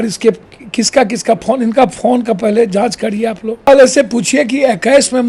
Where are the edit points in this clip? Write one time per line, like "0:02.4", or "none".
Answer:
0:03.7